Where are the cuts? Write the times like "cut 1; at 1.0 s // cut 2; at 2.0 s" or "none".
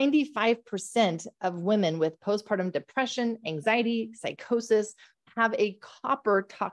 cut 1; at 5.2 s